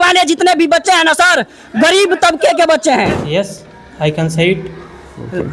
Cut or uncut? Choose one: cut